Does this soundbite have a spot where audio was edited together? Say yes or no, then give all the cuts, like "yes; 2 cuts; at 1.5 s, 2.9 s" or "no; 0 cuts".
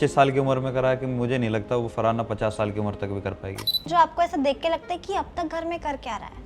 yes; 1 cut; at 3.9 s